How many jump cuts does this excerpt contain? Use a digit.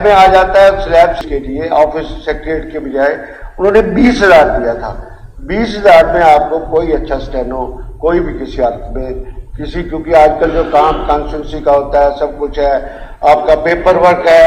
1